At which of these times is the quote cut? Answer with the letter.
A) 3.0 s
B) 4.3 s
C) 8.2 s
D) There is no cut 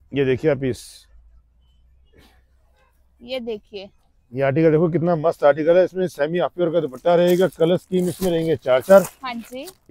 D